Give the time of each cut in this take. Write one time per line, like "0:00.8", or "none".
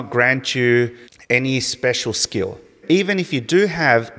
0:01.1
0:02.8